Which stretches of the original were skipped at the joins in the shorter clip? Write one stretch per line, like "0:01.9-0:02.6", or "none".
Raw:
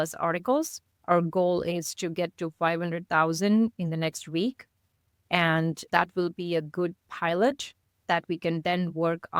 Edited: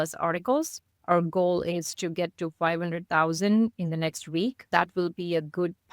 0:04.6-0:05.8